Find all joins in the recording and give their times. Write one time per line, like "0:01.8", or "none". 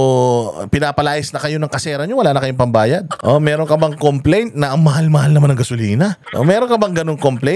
0:03.1
0:06.2